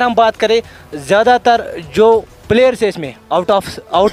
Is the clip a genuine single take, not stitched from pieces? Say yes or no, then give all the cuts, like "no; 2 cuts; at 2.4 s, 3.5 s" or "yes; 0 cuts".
no; 1 cut; at 2.3 s